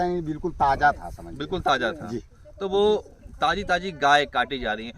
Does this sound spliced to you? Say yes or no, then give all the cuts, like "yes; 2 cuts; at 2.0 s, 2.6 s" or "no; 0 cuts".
no; 0 cuts